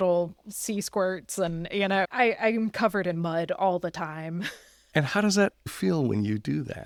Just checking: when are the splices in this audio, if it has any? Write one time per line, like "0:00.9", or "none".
none